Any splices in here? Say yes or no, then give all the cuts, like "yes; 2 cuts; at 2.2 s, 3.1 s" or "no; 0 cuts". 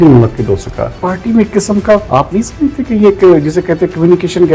yes; 2 cuts; at 1.0 s, 2.1 s